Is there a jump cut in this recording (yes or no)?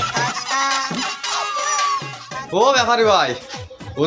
yes